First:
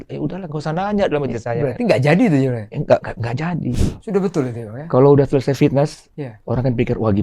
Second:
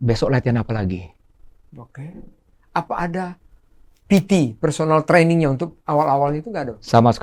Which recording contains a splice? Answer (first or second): first